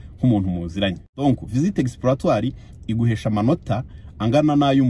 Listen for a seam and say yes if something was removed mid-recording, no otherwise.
yes